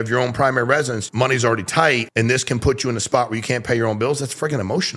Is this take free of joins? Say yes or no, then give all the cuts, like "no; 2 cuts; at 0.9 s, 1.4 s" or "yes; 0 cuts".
no; 2 cuts; at 1.0 s, 2.1 s